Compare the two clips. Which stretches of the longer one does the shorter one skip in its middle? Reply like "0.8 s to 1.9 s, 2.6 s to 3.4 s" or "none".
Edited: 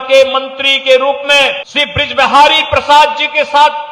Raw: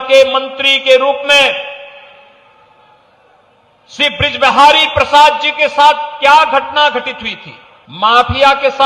1.7 s to 3.9 s